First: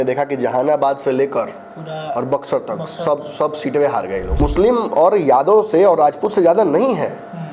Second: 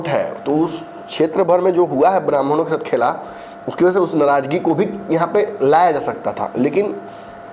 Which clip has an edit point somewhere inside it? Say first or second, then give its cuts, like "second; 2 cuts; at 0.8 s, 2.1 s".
first; 1 cut; at 4.3 s